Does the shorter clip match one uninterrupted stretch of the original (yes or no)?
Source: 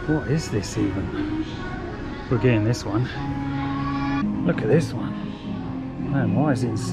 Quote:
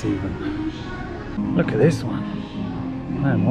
no